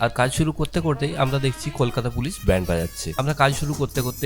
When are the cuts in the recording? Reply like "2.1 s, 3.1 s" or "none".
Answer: 3.0 s